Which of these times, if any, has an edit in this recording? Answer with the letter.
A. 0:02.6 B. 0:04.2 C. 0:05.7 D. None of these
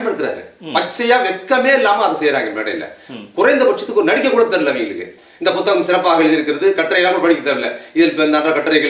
D